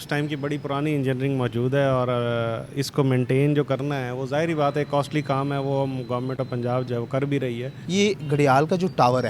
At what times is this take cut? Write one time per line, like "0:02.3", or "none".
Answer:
0:07.9